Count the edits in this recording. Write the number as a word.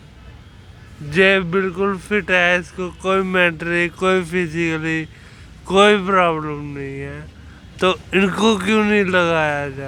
zero